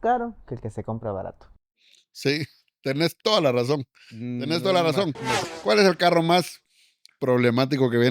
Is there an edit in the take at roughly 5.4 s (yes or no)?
yes